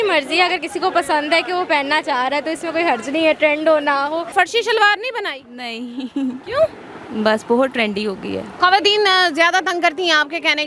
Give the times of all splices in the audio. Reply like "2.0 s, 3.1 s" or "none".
4.3 s, 8.4 s